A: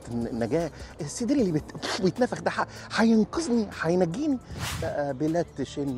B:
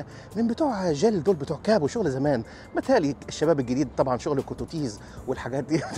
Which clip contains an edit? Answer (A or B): A